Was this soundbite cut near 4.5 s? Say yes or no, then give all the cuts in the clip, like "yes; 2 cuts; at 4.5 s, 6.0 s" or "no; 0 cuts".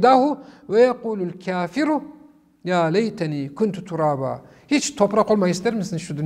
no; 0 cuts